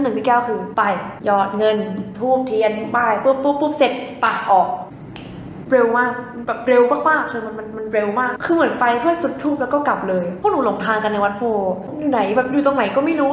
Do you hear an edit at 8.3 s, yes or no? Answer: yes